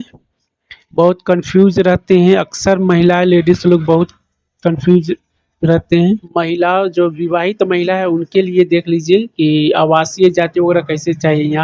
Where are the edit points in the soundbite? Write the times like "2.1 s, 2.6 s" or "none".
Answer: 6.3 s